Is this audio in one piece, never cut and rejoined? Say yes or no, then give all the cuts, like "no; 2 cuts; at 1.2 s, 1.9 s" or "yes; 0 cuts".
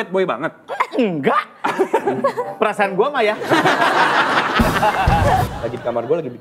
no; 1 cut; at 5.5 s